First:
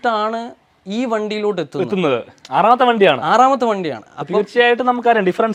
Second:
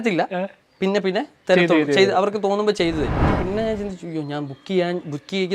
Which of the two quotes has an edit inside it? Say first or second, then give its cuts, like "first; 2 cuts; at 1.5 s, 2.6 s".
second; 1 cut; at 3.2 s